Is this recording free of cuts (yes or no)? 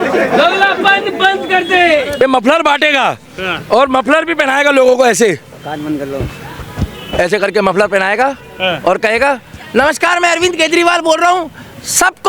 no